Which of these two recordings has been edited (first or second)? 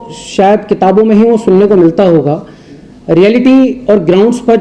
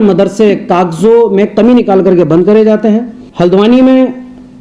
second